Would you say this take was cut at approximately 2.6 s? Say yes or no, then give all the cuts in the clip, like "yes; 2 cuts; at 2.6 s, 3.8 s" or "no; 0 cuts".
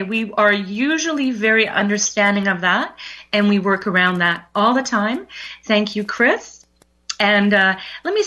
yes; 1 cut; at 2.6 s